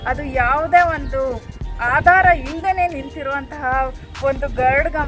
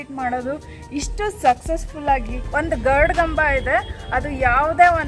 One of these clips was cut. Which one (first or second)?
second